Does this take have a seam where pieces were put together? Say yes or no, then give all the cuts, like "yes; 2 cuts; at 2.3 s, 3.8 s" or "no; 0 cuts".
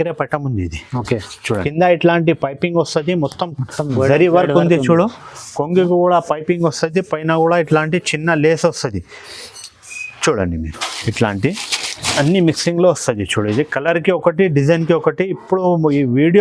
yes; 1 cut; at 1.4 s